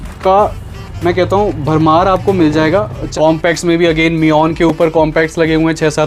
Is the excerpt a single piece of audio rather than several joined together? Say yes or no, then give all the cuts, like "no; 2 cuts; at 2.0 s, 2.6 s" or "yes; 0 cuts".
no; 1 cut; at 3.1 s